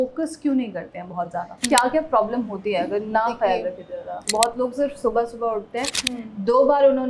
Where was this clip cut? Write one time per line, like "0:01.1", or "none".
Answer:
0:01.6
0:04.2